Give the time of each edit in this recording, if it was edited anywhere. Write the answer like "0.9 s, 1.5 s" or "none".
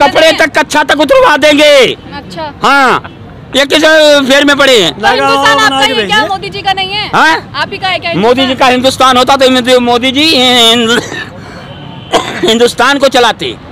none